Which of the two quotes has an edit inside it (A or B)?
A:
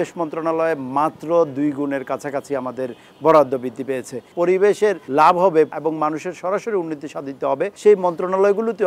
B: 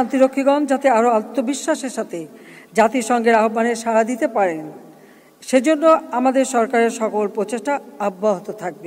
A